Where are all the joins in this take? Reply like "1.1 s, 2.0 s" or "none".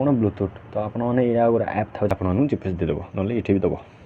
2.1 s

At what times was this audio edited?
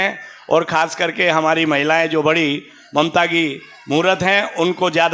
none

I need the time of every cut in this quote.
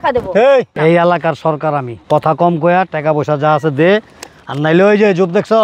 0.7 s, 1.9 s

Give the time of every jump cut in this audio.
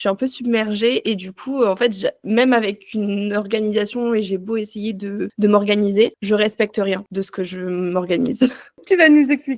8.7 s

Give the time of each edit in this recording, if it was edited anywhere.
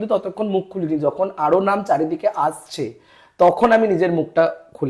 none

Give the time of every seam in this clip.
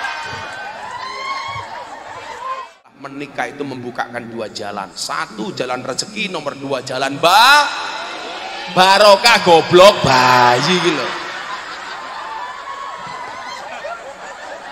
3.0 s

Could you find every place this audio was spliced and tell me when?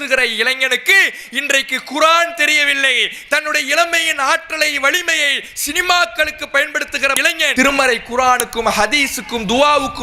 none

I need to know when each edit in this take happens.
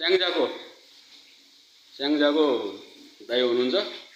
none

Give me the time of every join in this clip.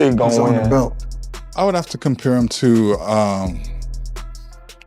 1.0 s

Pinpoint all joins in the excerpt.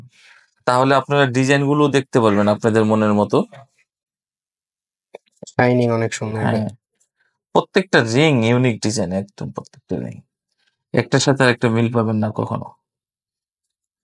none

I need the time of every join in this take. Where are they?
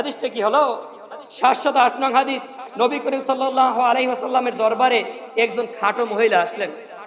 1.1 s

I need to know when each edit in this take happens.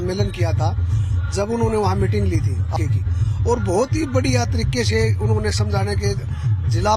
2.7 s

